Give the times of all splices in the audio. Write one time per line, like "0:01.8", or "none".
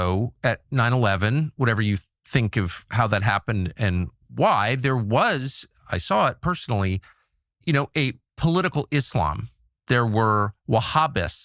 none